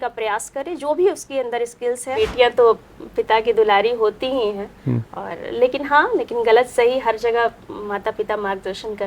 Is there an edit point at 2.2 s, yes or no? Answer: yes